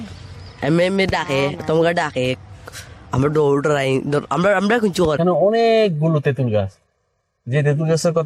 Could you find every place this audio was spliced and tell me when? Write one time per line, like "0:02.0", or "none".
0:05.2